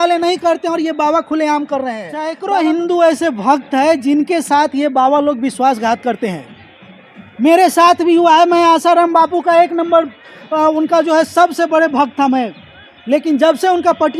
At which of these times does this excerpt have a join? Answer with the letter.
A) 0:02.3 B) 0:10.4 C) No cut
A